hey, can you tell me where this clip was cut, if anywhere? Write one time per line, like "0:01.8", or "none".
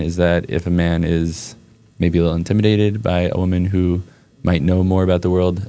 none